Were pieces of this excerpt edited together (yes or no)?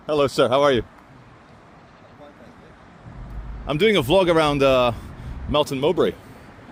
no